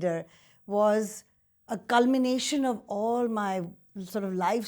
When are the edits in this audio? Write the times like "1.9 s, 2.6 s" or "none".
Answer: none